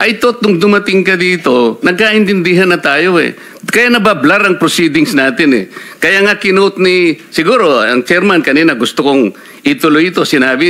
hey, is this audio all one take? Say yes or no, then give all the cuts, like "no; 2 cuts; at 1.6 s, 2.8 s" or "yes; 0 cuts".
yes; 0 cuts